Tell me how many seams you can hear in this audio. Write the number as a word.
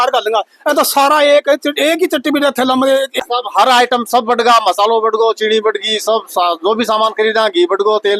one